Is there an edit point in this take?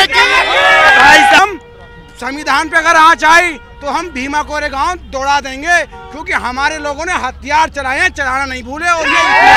yes; 1 cut; at 1.4 s

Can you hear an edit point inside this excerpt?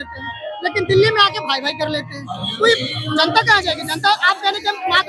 no; 0 cuts

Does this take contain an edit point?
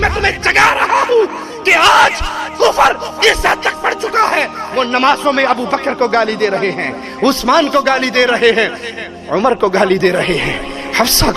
no; 0 cuts

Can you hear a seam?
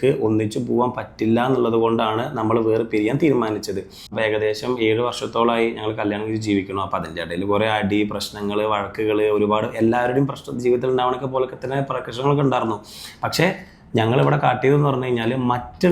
yes; 1 cut; at 4.1 s

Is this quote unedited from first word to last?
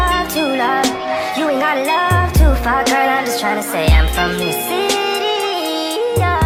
yes; 0 cuts

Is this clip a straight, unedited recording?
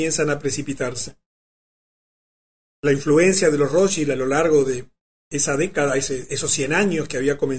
yes; 0 cuts

